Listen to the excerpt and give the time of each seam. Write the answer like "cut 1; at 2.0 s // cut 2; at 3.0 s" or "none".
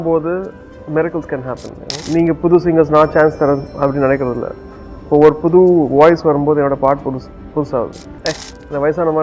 cut 1; at 1.9 s // cut 2; at 8.1 s